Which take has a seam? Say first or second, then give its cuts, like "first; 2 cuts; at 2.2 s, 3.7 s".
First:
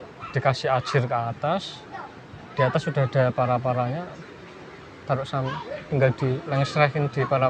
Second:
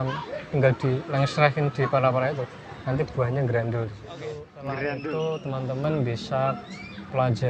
second; 1 cut; at 4.8 s